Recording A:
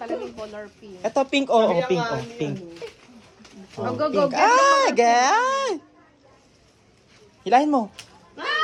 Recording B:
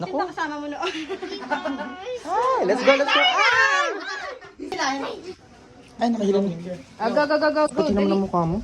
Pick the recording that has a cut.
B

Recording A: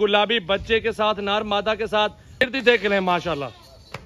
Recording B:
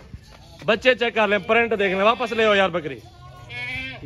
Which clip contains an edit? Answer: A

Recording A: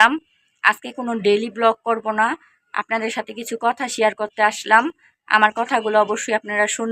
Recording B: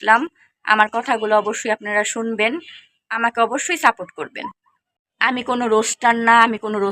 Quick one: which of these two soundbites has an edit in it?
B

